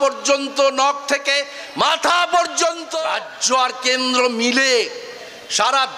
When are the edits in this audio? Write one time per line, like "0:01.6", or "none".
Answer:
0:02.9